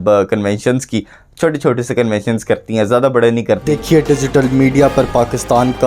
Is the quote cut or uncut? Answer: cut